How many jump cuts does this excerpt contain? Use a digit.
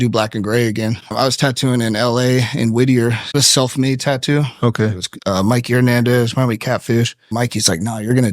3